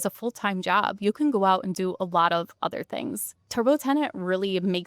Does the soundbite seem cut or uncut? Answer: cut